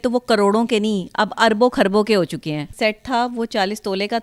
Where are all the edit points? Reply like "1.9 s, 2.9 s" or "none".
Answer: 2.7 s